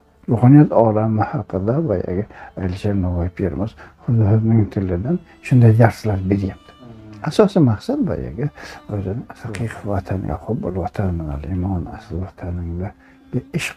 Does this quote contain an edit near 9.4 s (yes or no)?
yes